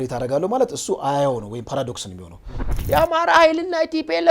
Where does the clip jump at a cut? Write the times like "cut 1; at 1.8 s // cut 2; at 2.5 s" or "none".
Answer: cut 1; at 2.7 s